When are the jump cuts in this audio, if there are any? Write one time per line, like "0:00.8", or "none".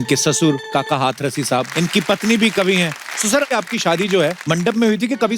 0:01.7
0:03.5
0:04.4